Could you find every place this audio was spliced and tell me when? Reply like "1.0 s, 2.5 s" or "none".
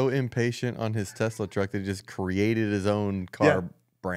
none